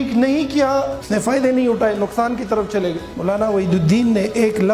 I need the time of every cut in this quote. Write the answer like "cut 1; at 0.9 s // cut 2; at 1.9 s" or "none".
cut 1; at 1.0 s // cut 2; at 3.1 s